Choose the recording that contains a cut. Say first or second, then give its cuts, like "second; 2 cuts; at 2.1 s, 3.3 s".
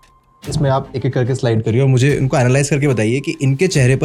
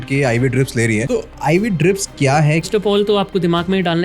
second; 2 cuts; at 1.1 s, 2.7 s